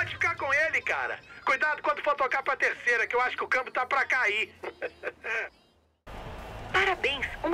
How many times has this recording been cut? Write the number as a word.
one